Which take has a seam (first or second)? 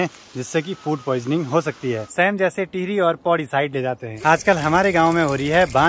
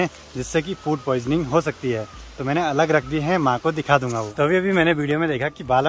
first